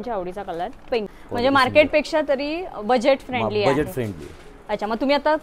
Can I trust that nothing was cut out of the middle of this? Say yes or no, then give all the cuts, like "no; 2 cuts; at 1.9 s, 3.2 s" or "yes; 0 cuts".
no; 1 cut; at 1.2 s